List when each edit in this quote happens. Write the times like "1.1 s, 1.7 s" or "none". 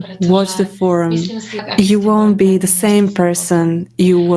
1.7 s